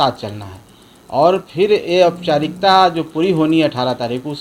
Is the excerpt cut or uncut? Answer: uncut